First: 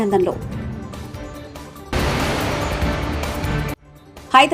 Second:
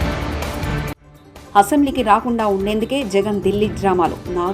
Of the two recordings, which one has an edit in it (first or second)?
second